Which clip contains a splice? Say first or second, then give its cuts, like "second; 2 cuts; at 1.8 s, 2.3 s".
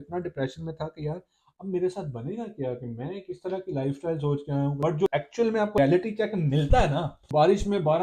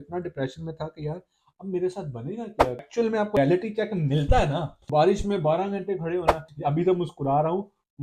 second; 2 cuts; at 2.9 s, 6.4 s